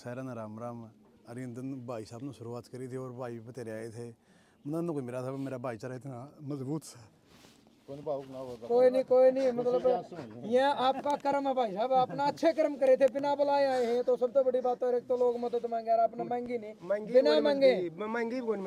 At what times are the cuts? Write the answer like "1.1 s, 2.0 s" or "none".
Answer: none